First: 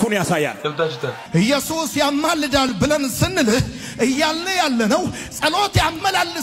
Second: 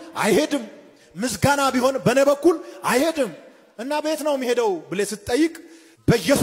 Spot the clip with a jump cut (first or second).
first